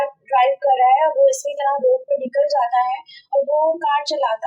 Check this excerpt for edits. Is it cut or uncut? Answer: uncut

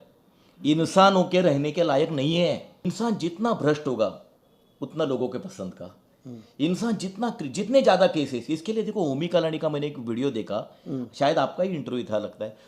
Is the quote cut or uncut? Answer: cut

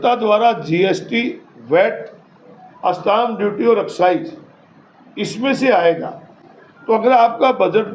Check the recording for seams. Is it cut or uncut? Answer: uncut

